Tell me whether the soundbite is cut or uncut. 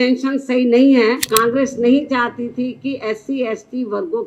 cut